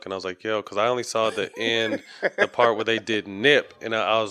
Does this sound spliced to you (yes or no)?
no